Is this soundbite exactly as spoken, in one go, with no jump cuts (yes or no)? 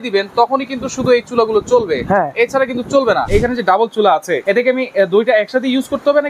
no